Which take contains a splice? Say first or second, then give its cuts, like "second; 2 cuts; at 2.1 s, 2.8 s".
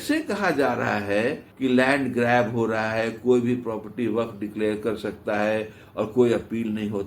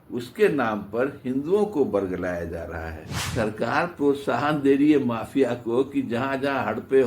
second; 1 cut; at 3.1 s